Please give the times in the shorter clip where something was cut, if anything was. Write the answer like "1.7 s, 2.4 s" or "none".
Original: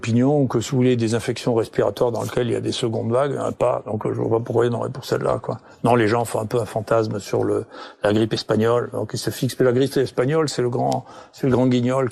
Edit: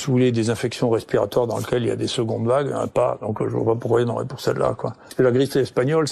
5.0 s